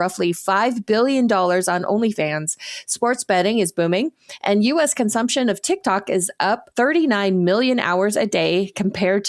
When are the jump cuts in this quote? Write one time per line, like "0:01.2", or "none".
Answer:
0:06.7

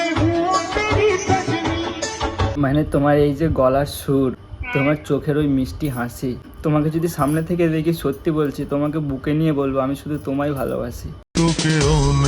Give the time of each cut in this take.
0:02.5
0:04.5
0:06.5

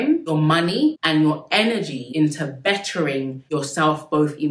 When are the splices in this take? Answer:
0:02.0
0:03.4

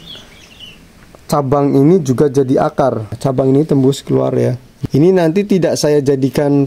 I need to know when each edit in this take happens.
0:03.2
0:04.7

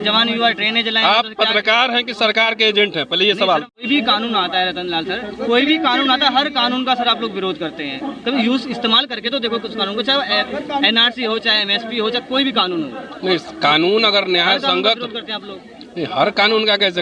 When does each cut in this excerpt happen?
0:03.9

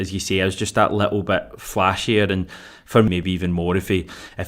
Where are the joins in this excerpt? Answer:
0:03.1

